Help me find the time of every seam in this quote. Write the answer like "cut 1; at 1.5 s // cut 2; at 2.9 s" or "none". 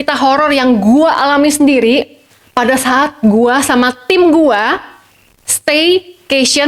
none